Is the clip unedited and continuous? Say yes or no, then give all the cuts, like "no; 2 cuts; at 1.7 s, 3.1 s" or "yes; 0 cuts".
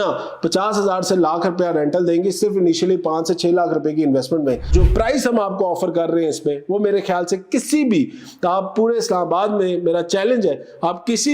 no; 1 cut; at 4.7 s